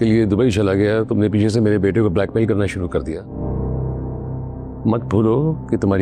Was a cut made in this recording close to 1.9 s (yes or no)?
no